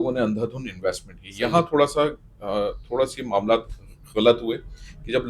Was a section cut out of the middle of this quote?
no; 0 cuts

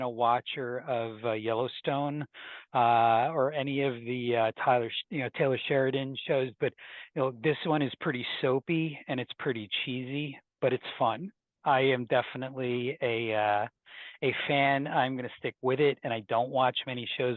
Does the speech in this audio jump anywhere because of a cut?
no; 0 cuts

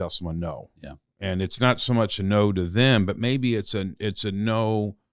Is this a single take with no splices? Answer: yes; 0 cuts

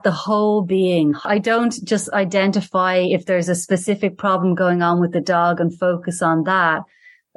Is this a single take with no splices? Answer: no; 1 cut; at 1.2 s

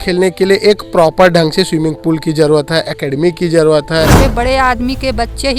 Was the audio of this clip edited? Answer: yes; 1 cut; at 4.2 s

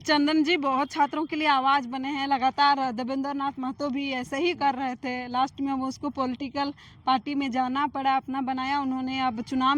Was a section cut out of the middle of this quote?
no; 0 cuts

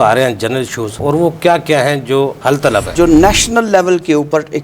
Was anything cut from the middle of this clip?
yes; 2 cuts; at 1.0 s, 2.9 s

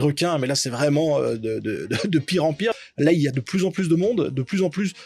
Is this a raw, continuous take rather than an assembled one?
no; 1 cut; at 2.7 s

